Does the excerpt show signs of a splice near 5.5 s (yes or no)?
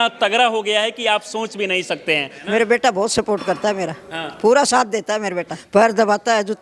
yes